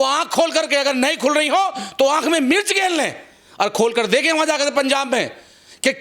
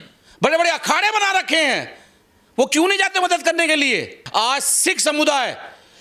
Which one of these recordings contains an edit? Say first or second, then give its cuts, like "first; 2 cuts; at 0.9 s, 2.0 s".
second; 1 cut; at 4.2 s